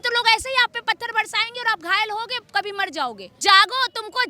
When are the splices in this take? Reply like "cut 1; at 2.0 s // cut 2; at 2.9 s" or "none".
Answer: cut 1; at 3.4 s

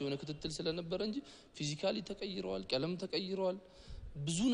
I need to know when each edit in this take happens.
none

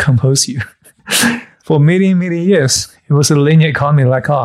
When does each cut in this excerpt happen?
cut 1; at 1.3 s

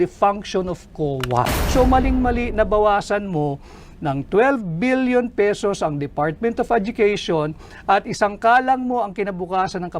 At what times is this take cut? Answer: cut 1; at 1.5 s

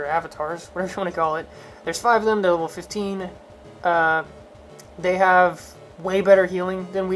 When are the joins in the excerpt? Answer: none

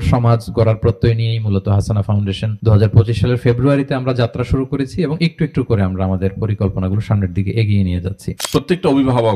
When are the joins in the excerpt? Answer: cut 1; at 2.5 s // cut 2; at 8.4 s

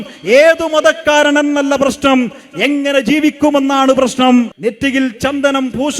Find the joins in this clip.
cut 1; at 4.5 s

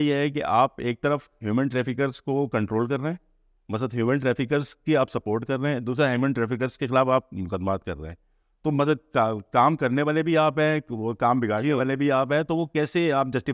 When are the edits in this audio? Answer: none

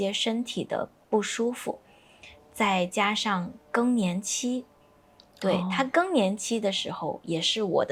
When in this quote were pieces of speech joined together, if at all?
none

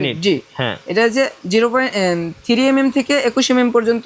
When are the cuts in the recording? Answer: none

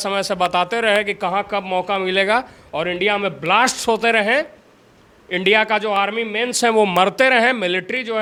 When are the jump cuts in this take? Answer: none

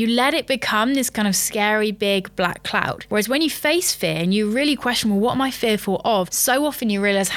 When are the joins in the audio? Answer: none

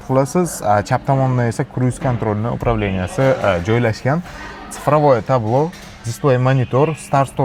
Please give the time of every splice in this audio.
none

